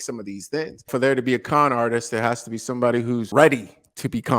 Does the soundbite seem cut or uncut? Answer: cut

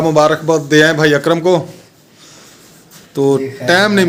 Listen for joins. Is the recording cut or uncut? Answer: uncut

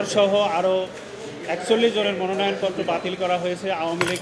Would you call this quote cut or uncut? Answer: uncut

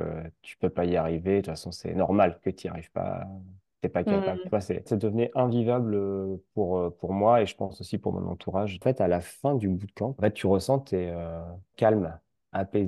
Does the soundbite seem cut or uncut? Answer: cut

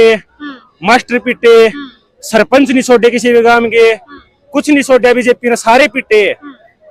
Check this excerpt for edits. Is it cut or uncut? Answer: uncut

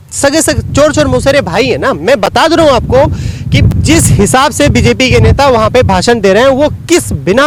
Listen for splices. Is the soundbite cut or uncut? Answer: uncut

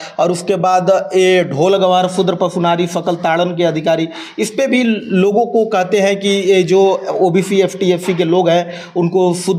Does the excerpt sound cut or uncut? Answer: uncut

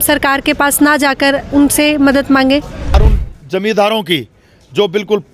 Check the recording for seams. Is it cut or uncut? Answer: cut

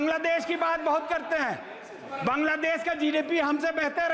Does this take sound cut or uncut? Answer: uncut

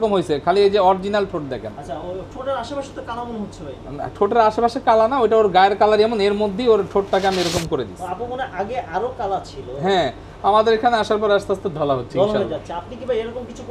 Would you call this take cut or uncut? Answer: uncut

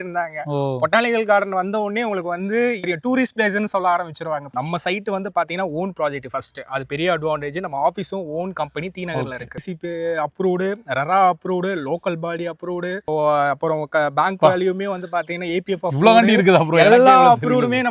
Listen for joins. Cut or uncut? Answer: cut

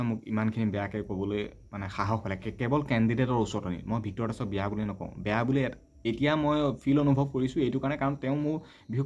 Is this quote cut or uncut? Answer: uncut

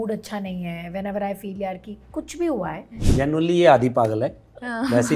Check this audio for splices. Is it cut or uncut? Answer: cut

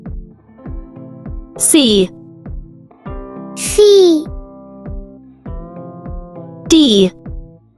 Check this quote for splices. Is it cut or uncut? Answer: uncut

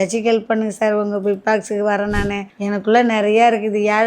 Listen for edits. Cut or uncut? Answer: cut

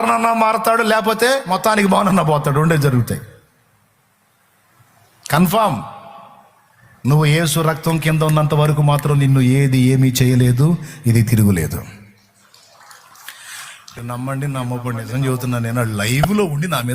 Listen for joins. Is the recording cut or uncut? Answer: cut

